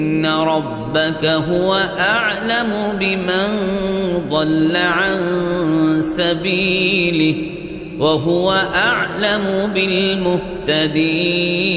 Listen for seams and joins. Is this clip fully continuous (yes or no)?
yes